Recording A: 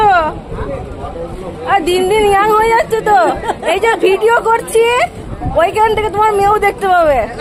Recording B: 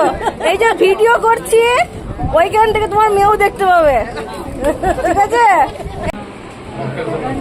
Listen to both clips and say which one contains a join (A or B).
B